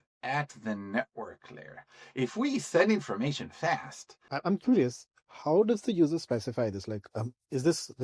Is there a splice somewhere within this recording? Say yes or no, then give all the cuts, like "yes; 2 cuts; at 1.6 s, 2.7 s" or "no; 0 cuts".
yes; 1 cut; at 4.2 s